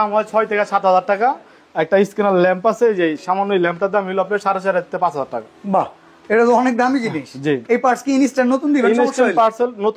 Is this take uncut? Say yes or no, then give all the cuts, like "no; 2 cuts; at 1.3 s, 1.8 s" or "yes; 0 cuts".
yes; 0 cuts